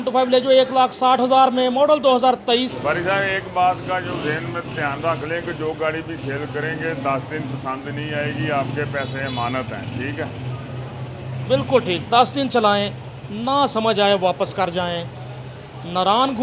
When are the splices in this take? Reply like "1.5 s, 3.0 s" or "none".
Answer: 2.7 s